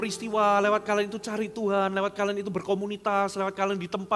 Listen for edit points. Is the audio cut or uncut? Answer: uncut